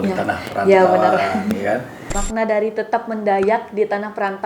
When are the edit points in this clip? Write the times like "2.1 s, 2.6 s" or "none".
2.2 s